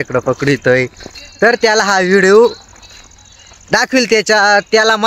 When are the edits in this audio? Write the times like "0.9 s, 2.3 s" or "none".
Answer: none